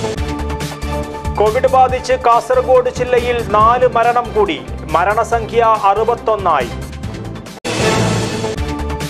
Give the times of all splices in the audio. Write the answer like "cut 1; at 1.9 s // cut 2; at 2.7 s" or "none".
cut 1; at 0.9 s